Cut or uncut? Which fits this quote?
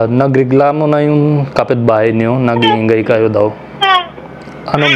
uncut